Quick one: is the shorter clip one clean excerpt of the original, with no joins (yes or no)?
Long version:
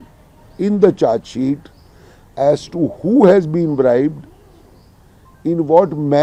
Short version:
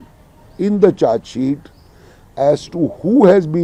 yes